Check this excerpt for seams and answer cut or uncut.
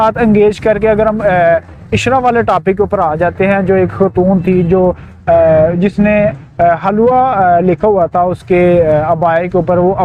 uncut